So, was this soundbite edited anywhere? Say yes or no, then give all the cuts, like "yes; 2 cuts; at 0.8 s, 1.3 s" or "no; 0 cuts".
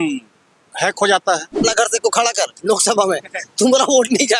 yes; 1 cut; at 1.6 s